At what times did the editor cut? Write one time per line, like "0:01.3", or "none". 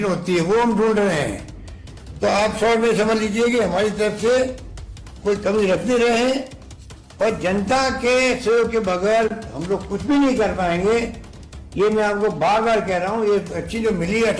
none